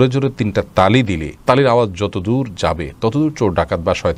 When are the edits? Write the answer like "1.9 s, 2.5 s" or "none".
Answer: none